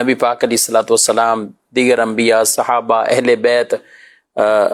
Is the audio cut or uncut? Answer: uncut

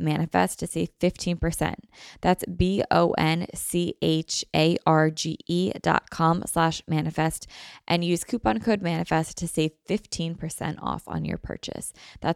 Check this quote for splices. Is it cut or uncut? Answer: uncut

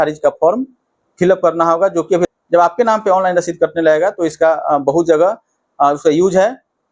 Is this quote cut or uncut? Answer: cut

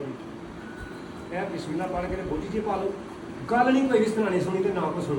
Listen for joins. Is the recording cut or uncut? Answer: uncut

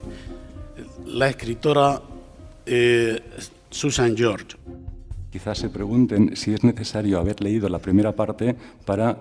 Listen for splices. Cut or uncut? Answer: cut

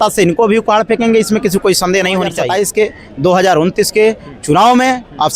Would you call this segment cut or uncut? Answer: cut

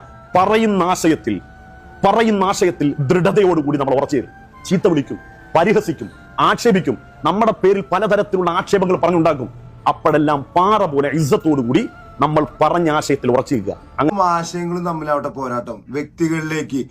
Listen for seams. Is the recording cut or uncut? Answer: cut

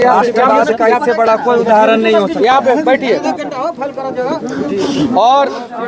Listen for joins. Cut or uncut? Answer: uncut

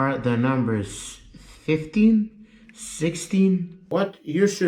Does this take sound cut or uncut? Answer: cut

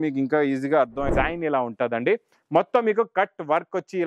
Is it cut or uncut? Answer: cut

